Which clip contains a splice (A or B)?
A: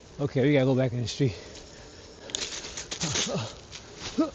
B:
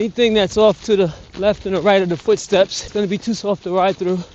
B